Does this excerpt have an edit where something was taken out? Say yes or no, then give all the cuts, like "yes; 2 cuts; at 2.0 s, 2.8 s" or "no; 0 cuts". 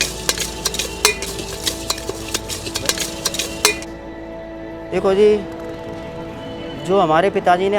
no; 0 cuts